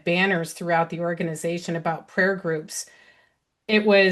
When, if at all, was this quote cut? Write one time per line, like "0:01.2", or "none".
none